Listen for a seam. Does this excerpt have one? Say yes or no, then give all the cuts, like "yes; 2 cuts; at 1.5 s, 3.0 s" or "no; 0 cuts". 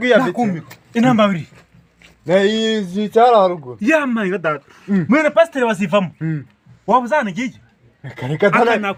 no; 0 cuts